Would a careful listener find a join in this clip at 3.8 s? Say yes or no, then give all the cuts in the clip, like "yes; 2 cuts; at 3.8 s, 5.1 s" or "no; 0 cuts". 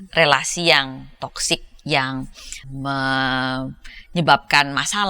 no; 1 cut; at 2.6 s